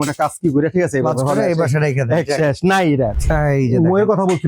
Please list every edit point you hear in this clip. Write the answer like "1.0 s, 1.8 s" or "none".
3.2 s